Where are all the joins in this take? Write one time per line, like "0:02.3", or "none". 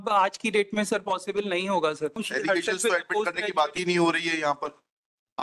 0:02.2